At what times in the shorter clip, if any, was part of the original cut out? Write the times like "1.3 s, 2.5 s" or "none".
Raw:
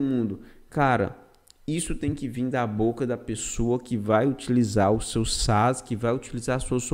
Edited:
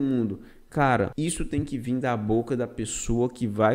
1.1 s

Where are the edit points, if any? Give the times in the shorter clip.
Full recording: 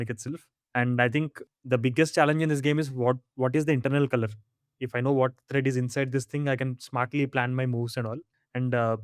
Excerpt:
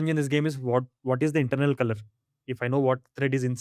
none

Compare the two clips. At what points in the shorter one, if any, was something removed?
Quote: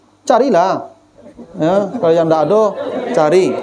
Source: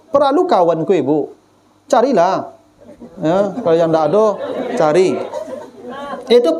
none

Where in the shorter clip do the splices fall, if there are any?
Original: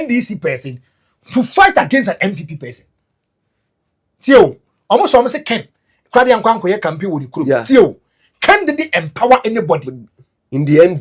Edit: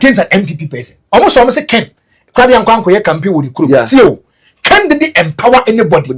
0.9 s

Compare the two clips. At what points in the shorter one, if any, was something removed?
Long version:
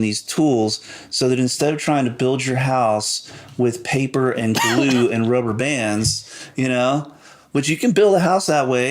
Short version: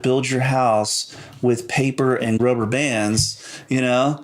2.4 s

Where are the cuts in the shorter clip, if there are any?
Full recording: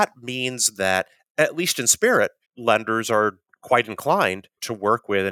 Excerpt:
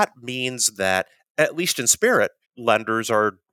none

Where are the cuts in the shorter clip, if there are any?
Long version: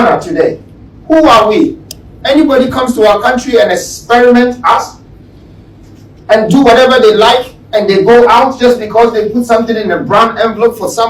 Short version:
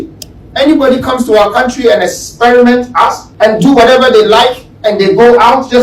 3.3 s

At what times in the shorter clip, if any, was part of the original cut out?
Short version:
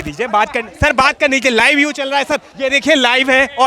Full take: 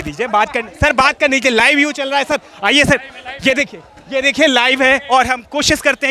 2.5 s

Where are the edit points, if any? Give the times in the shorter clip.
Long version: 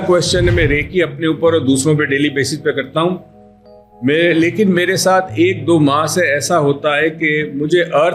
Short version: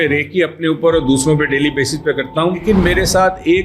2.6 s

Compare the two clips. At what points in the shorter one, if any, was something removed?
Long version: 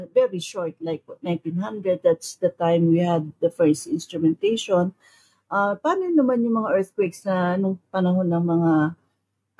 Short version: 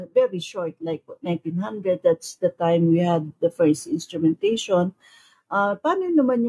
none

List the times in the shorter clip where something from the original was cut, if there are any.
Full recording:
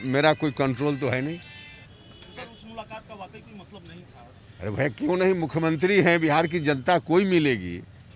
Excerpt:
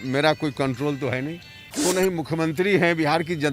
1.7 s

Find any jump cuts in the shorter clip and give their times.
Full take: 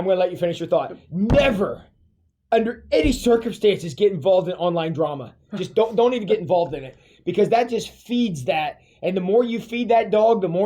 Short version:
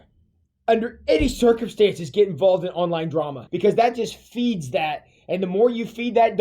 3.4 s

